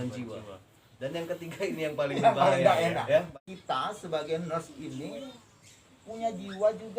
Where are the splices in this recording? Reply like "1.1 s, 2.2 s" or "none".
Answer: 3.3 s